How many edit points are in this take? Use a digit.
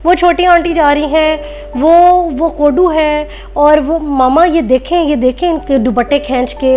1